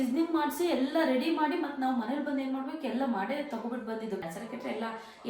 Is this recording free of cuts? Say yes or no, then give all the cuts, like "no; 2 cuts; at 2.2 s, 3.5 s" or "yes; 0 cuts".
no; 1 cut; at 4.2 s